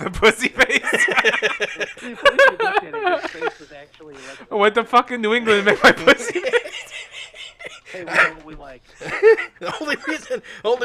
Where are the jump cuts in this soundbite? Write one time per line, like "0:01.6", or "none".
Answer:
0:01.9